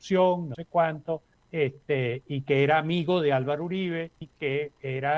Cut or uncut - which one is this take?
cut